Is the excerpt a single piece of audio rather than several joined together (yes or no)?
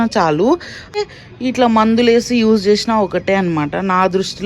no